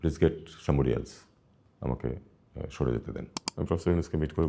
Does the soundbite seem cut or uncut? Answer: cut